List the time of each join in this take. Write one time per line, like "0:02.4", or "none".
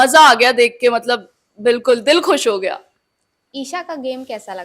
none